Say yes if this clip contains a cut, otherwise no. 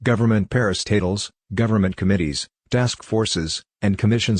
no